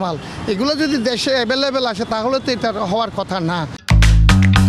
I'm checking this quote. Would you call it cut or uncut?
cut